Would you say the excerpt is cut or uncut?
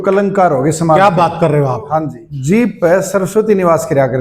cut